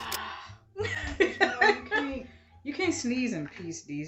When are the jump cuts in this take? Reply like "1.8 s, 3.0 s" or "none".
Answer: 2.0 s